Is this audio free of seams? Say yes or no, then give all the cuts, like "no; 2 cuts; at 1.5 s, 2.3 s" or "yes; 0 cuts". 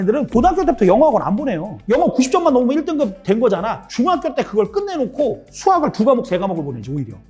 yes; 0 cuts